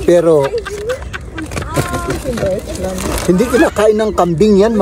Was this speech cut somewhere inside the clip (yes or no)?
no